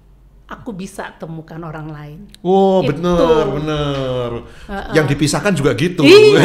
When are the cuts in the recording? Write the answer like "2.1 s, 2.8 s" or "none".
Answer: none